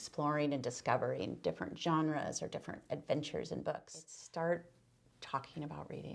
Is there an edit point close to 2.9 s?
no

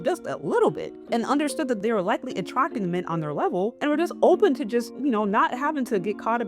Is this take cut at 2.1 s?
no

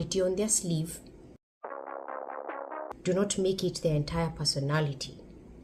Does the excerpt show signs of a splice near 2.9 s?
yes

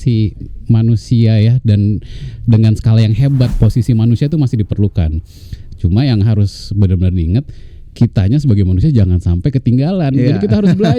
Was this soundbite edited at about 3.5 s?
yes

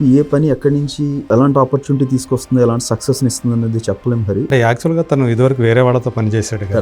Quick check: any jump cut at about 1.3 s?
yes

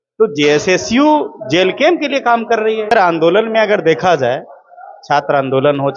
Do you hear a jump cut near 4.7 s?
no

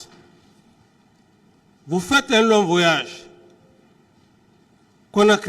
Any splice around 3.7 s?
no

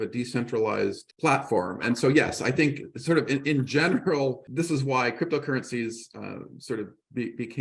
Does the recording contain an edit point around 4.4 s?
yes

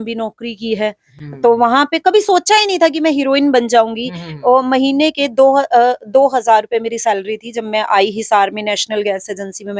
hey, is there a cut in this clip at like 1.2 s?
no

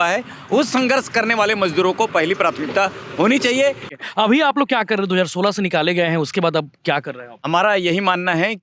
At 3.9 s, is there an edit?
yes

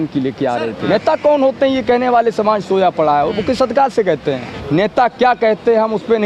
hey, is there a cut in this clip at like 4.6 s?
yes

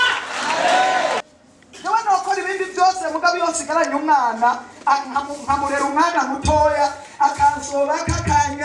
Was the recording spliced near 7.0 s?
no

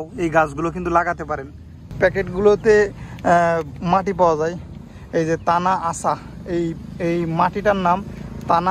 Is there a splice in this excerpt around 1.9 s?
yes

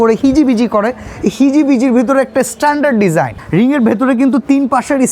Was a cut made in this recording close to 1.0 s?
no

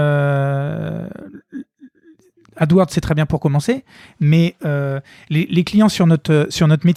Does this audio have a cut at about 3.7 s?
no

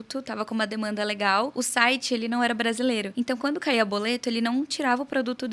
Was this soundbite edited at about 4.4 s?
no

